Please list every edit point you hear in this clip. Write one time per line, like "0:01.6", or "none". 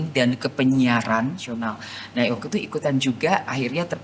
0:01.5